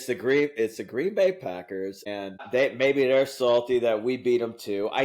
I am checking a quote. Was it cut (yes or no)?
yes